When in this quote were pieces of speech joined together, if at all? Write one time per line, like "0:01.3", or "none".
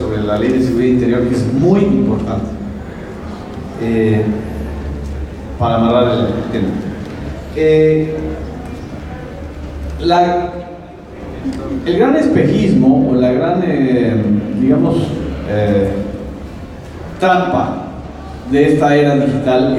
0:06.1